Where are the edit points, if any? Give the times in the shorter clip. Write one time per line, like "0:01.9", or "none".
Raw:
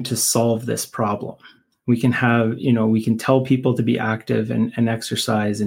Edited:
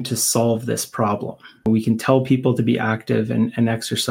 0:01.7